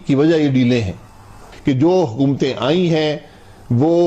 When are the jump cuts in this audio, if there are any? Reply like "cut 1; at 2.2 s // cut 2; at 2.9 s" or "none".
cut 1; at 1.5 s